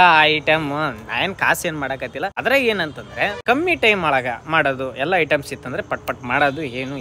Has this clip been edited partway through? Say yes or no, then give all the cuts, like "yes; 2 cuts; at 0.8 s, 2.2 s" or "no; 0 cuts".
no; 0 cuts